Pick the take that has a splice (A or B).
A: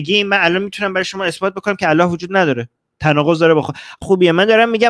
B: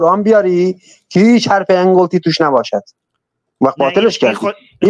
A